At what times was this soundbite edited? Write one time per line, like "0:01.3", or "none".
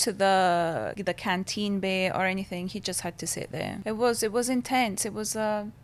0:00.9
0:03.8

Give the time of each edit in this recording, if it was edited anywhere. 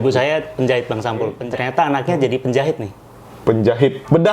0:01.4

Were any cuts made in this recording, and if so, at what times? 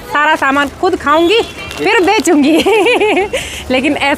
none

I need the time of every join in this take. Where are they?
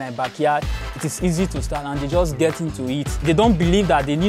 0:03.2

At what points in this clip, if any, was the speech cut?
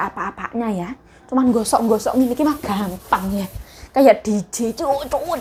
none

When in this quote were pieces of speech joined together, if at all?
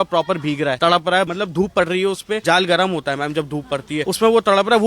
0:01.1
0:02.4
0:04.0

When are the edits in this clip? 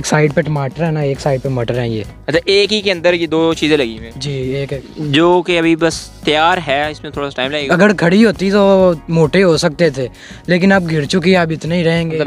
0:05.0
0:07.7

